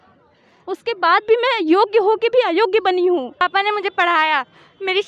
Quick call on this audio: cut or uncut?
cut